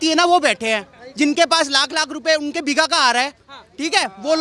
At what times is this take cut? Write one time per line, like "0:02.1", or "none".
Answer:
none